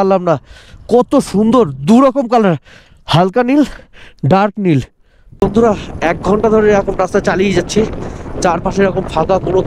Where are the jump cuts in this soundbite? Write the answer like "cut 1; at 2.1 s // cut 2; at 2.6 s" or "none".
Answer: cut 1; at 5.4 s